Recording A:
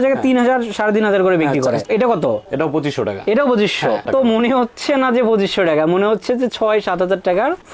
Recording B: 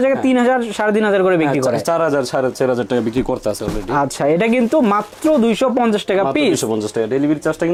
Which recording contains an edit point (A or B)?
A